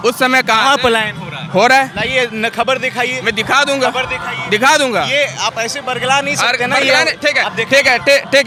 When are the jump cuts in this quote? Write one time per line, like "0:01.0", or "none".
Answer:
none